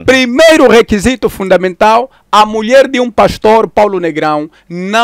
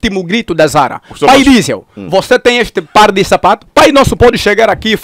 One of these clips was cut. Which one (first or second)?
second